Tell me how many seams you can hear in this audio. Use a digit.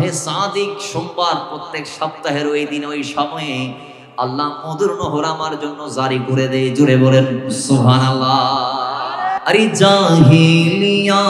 1